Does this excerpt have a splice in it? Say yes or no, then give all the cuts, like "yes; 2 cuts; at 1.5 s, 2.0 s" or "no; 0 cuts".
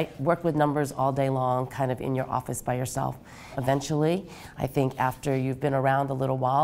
yes; 1 cut; at 3.6 s